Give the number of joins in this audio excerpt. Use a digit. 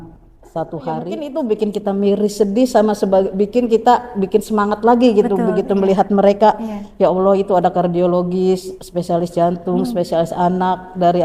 1